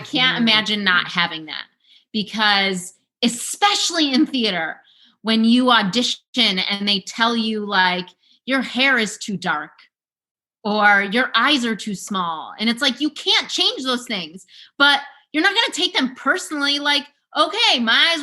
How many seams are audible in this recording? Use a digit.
0